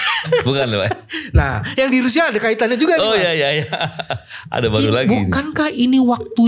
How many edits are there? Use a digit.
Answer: 0